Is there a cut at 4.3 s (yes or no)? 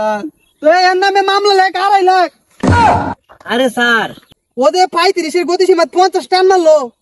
yes